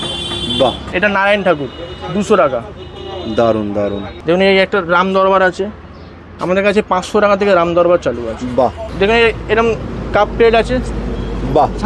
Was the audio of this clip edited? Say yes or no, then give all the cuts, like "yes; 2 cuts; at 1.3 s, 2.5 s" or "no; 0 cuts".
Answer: yes; 3 cuts; at 0.9 s, 4.1 s, 8.8 s